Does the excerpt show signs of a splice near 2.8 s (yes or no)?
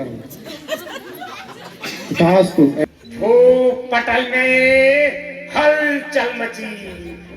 yes